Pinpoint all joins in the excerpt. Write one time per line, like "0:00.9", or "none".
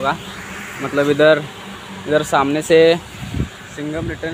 none